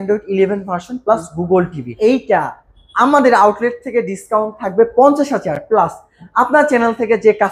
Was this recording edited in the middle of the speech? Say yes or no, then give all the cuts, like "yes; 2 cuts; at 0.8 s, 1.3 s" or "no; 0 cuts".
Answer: yes; 1 cut; at 1.8 s